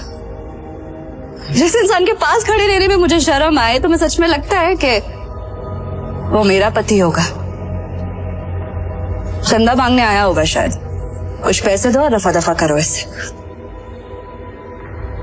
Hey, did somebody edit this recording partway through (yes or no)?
no